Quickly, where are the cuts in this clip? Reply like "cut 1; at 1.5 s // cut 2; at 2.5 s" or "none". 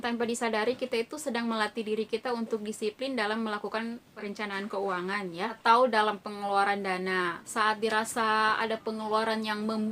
cut 1; at 4.2 s

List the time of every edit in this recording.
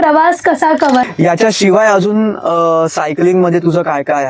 cut 1; at 1.0 s

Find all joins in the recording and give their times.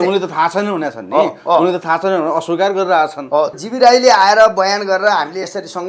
cut 1; at 3.6 s

